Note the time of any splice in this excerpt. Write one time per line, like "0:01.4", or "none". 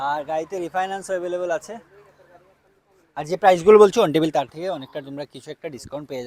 none